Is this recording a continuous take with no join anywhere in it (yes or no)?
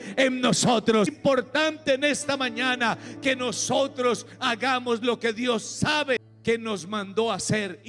no